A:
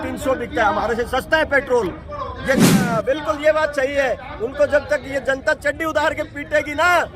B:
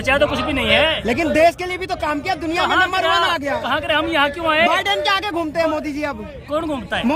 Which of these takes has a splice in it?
A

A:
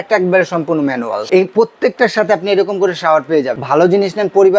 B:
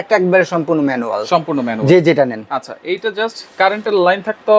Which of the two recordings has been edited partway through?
A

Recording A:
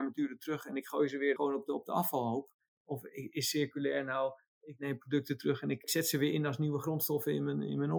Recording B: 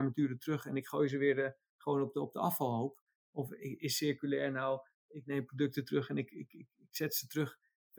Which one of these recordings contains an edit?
A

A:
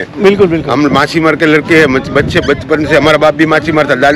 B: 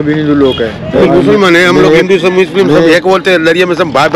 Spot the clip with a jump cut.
B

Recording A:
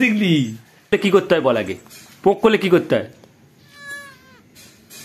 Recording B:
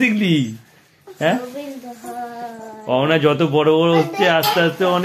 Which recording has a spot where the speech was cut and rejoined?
A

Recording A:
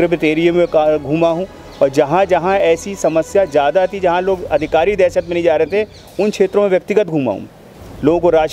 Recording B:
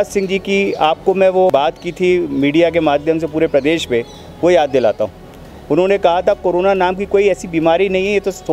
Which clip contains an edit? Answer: B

